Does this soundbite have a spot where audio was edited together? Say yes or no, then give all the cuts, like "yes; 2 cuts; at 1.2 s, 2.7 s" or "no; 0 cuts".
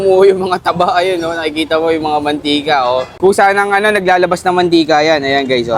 yes; 1 cut; at 3.1 s